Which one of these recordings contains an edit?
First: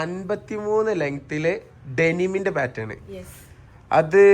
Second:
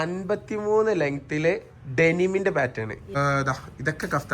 second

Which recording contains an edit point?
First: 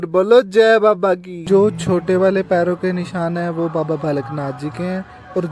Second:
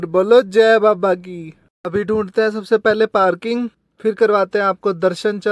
first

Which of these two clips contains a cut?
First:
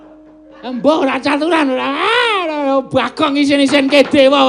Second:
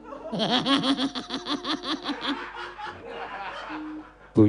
second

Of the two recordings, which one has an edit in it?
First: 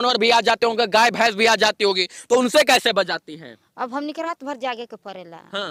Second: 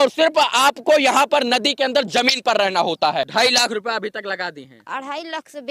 second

